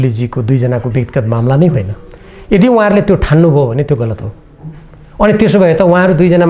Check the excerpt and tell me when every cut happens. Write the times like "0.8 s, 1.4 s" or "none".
none